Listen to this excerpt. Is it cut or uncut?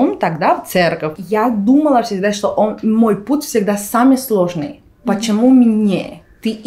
cut